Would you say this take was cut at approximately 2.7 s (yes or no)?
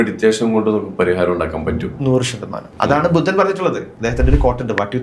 yes